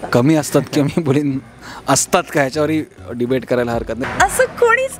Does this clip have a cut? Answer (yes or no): yes